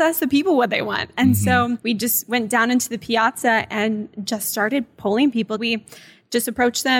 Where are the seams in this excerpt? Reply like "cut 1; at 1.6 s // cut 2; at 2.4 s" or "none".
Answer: cut 1; at 1.8 s // cut 2; at 5.6 s